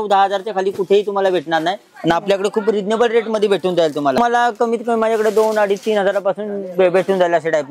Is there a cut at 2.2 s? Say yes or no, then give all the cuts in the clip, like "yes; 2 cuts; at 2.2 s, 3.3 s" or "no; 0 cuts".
no; 1 cut; at 4.2 s